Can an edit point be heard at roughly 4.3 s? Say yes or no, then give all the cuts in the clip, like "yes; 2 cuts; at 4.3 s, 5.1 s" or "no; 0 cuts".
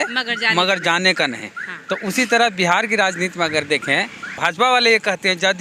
yes; 1 cut; at 4.3 s